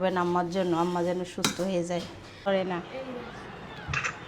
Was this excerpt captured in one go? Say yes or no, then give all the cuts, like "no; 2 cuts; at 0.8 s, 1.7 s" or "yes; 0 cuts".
no; 1 cut; at 2.5 s